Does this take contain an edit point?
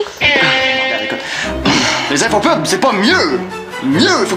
yes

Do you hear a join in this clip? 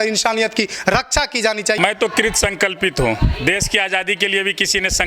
yes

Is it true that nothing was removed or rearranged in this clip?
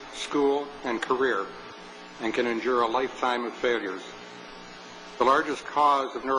no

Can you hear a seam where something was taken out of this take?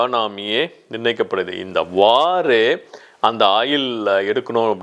no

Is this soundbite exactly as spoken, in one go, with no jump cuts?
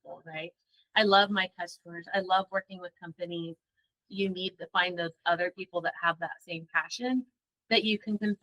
no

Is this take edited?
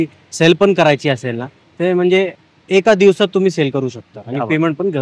no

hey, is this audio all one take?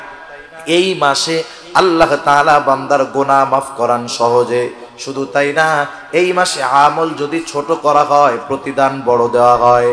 yes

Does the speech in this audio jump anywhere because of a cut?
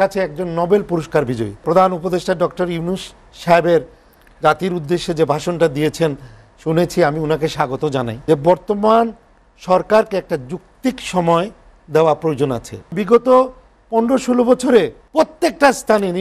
yes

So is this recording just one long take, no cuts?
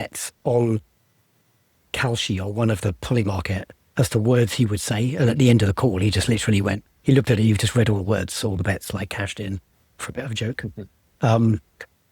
yes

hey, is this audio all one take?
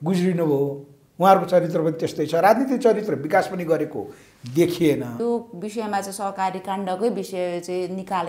no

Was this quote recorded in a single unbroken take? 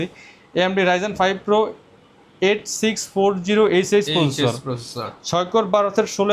yes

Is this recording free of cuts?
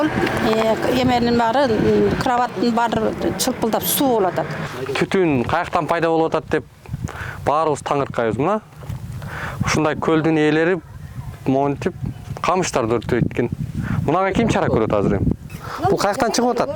no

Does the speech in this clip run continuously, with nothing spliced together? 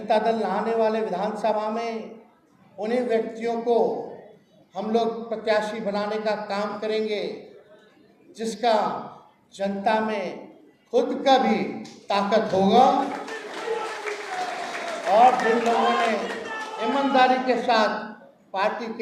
yes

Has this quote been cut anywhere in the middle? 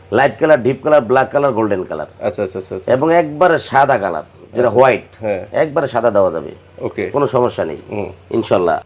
no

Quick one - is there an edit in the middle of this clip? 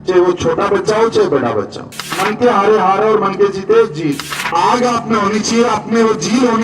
yes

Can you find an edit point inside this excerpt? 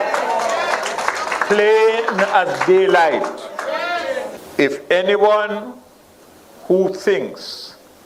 yes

